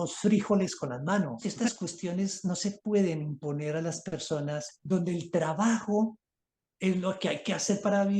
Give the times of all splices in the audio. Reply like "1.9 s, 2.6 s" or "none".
1.4 s, 4.7 s